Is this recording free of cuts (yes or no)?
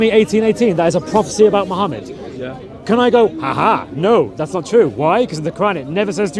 yes